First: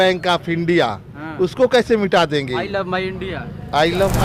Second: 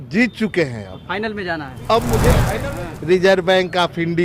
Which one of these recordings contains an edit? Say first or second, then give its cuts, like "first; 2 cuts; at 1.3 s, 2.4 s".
second; 1 cut; at 2.5 s